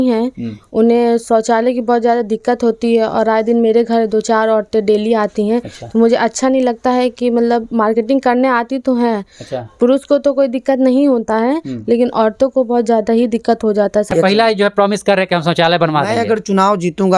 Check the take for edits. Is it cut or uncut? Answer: cut